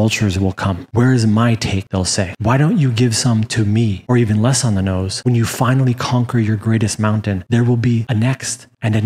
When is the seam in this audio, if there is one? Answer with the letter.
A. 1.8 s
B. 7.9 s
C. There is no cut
A